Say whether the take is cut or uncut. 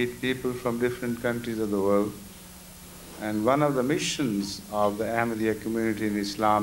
uncut